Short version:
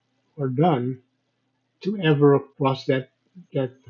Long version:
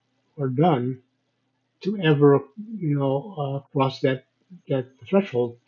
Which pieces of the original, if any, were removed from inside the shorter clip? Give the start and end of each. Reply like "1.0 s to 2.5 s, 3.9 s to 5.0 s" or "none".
2.5 s to 3.7 s